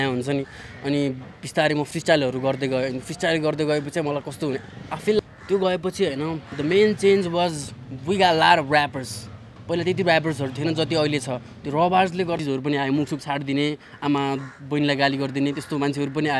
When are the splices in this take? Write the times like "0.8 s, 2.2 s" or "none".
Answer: 5.2 s, 12.4 s